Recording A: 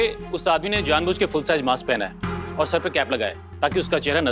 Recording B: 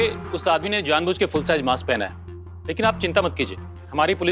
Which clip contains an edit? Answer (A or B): B